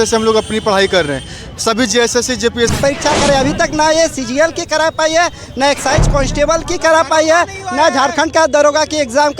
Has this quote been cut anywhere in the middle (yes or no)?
yes